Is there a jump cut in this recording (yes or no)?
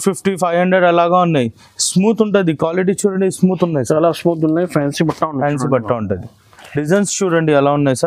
yes